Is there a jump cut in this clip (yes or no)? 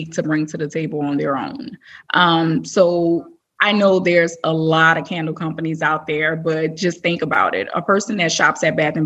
no